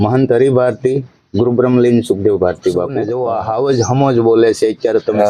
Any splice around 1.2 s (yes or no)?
no